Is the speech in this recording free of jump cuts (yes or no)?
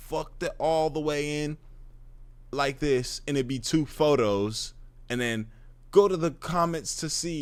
yes